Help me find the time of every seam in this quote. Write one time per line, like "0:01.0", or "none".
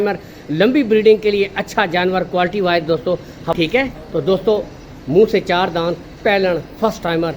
0:03.5

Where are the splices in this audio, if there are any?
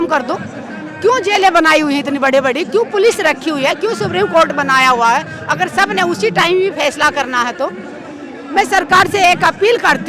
none

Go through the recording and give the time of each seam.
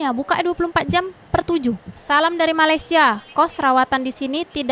0:01.7

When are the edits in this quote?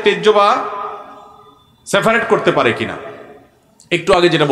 none

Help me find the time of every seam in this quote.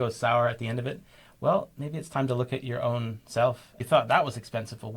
0:03.7

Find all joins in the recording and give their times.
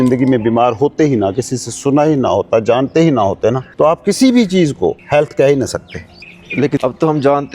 0:03.7
0:05.0
0:06.4

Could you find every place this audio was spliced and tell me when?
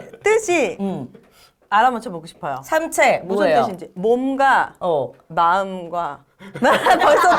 none

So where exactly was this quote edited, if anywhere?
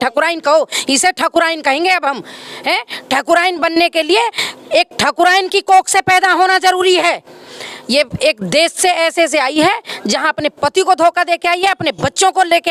none

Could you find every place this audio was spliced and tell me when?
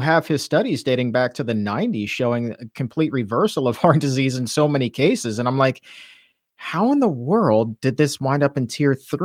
none

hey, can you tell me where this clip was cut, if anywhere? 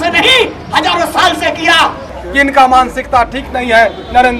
0:02.1

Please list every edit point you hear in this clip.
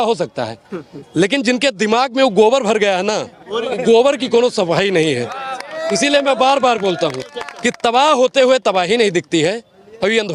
none

